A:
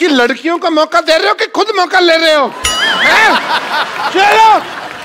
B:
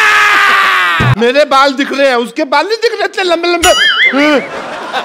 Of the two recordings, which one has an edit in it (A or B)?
B